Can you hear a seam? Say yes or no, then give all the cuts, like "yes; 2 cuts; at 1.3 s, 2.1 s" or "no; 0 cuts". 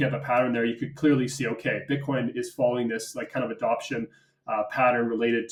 no; 0 cuts